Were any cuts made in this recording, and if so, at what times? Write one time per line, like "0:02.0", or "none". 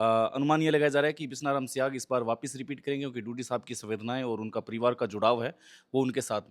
none

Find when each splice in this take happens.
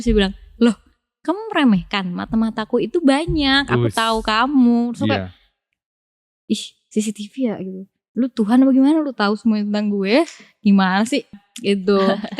none

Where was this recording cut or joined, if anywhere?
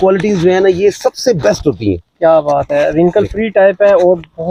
none

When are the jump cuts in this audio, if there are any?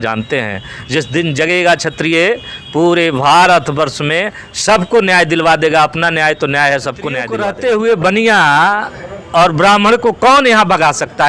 0:07.3

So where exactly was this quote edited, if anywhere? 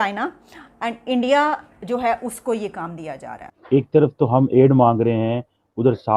0:03.5

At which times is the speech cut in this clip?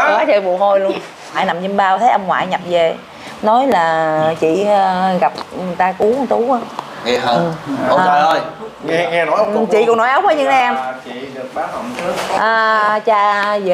0:01.4

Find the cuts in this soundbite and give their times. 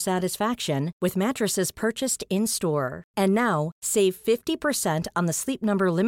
none

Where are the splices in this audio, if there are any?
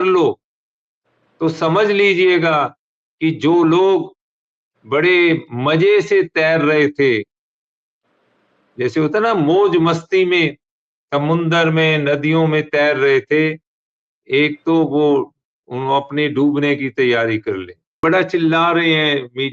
0:17.9

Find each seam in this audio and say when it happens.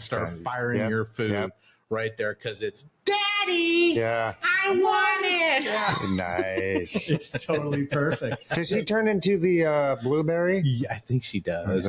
none

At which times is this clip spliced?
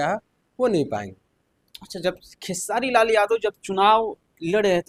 none

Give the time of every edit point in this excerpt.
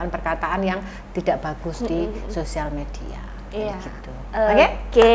none

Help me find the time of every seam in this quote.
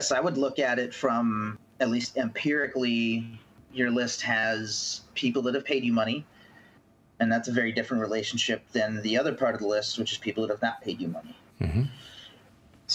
0:01.6

